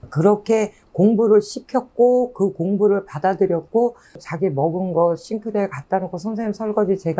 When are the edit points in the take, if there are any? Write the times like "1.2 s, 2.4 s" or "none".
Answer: 4.2 s